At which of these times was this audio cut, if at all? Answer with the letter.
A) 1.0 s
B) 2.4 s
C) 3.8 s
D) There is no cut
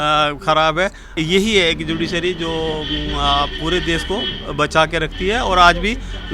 A